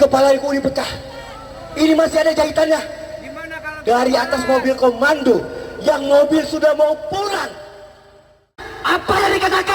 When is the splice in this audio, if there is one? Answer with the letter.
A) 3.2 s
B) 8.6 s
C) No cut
B